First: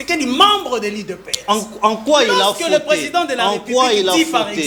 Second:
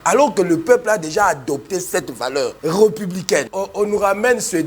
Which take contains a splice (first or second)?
second